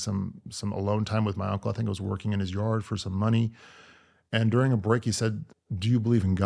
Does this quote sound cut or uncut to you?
cut